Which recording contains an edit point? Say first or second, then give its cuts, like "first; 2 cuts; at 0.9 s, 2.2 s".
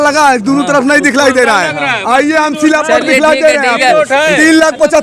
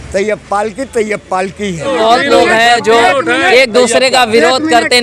second; 1 cut; at 1.9 s